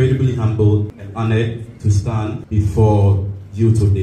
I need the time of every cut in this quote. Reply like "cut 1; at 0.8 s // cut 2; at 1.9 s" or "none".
cut 1; at 1.0 s // cut 2; at 2.4 s